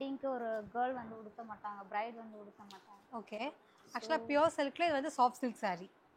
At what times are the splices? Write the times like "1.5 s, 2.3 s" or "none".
3.4 s